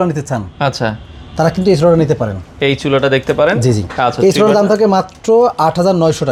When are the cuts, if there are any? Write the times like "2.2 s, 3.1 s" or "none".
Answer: none